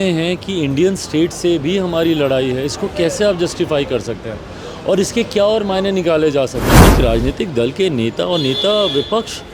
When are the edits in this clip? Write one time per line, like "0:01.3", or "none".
0:06.8